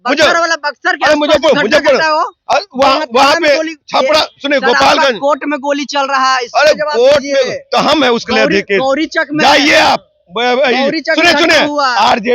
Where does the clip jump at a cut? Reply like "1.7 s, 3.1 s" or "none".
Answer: none